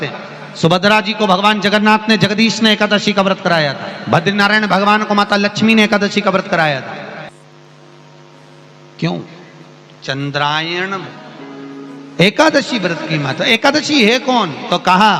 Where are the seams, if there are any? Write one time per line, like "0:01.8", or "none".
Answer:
none